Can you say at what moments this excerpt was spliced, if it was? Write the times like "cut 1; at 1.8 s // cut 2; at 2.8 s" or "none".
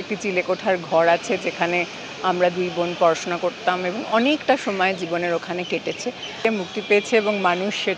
cut 1; at 6.4 s